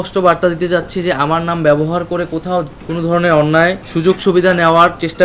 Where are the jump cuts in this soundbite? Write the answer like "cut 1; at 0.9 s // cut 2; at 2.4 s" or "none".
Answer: cut 1; at 2.8 s // cut 2; at 3.9 s